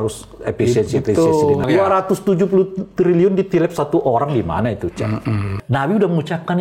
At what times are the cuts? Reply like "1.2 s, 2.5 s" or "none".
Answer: 1.6 s, 5.5 s